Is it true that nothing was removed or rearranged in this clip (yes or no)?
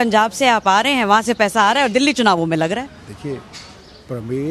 yes